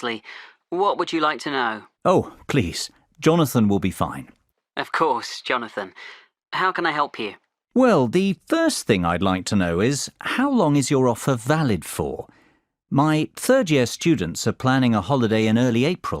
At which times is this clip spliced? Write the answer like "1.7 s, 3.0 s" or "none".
15.0 s

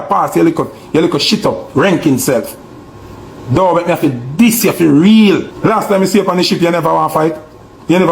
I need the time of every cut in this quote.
5.5 s

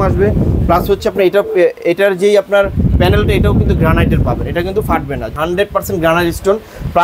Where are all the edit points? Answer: 5.3 s

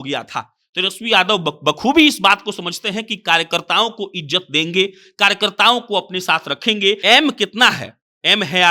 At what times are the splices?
7.0 s

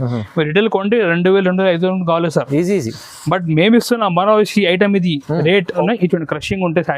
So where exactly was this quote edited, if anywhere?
5.8 s

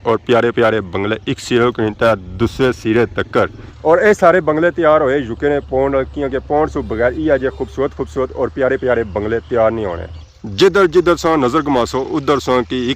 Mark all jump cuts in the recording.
3.7 s

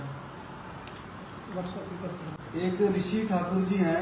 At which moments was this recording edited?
2.4 s

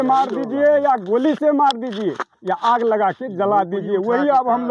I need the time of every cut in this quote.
none

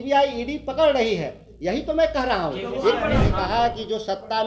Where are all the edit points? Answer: 3.3 s

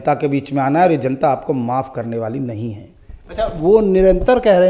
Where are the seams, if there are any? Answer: none

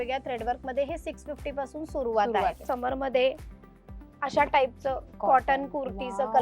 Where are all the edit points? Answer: 2.6 s

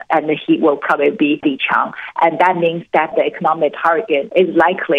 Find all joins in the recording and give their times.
3.1 s, 4.3 s

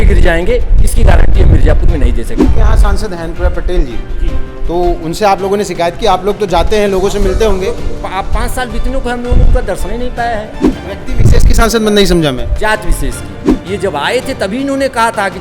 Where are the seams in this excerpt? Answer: 2.5 s, 10.7 s, 13.5 s

